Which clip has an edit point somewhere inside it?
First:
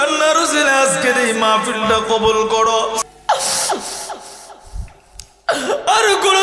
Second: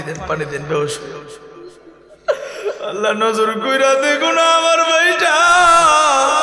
first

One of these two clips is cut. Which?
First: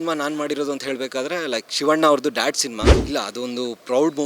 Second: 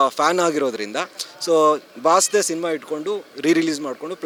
first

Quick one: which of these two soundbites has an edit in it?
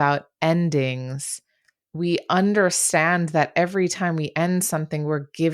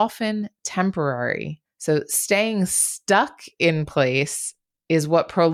first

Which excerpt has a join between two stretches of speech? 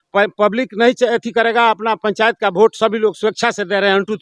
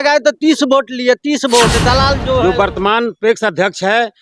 second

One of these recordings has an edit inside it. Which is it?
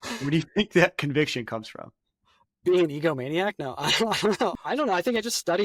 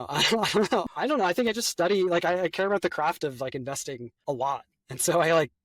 second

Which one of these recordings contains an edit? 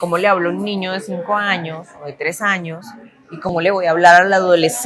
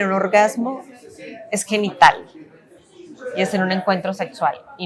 first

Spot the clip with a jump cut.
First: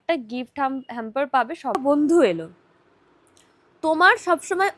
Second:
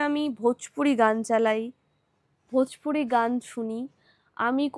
first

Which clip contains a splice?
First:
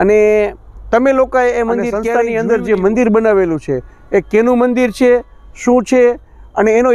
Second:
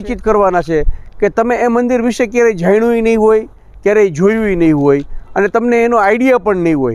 first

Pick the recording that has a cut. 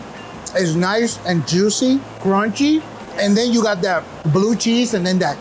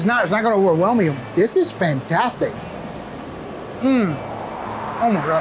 first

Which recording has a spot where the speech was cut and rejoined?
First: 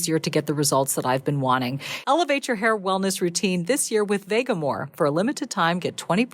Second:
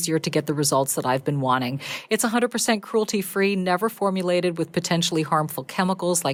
first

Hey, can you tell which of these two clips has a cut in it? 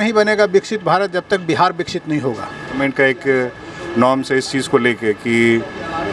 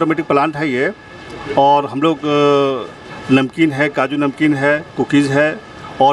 first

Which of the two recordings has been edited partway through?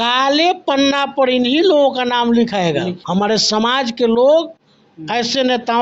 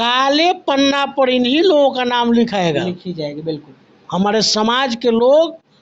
first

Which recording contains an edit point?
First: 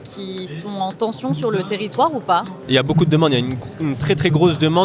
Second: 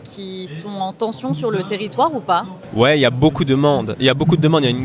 first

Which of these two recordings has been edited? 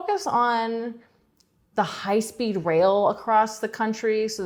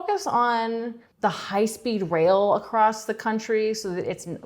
second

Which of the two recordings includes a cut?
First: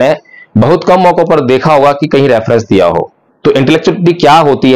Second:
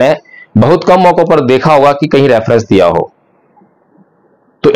first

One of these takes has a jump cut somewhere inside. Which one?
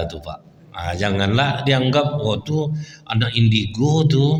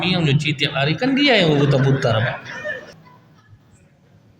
second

